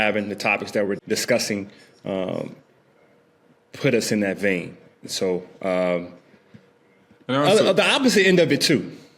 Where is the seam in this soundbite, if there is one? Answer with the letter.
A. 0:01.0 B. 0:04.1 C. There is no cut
A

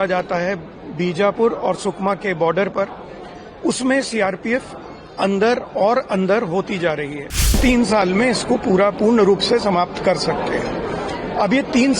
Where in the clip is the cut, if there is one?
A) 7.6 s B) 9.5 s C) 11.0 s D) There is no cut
A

